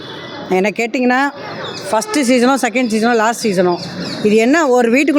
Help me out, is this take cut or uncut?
uncut